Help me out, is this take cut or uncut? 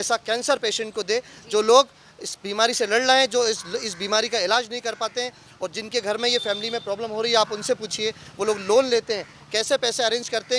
uncut